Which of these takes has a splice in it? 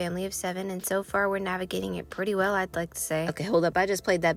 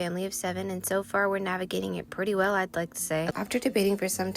second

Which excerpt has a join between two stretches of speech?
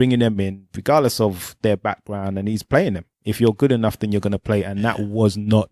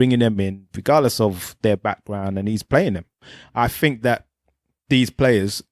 second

